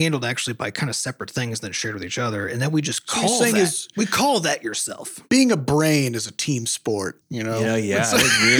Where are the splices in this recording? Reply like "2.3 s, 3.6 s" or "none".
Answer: 5.2 s, 7.3 s

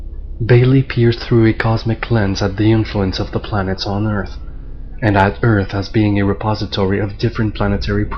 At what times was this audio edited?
5.2 s

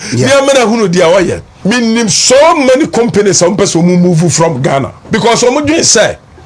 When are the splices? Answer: 1.5 s, 5.0 s

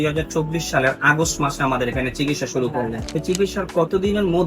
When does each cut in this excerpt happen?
3.0 s

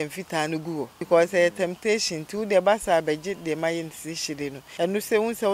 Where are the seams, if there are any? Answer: 1.0 s, 4.6 s

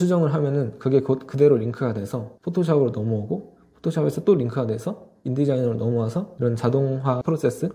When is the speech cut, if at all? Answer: none

